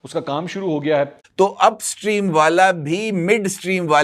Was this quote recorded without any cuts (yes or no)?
no